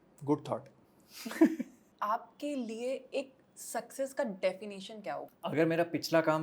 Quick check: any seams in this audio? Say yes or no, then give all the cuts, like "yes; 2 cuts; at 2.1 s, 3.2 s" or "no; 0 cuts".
yes; 2 cuts; at 1.9 s, 5.3 s